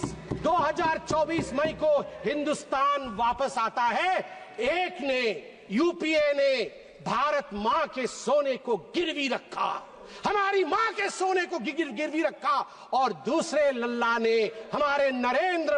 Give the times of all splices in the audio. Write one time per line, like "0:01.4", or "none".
none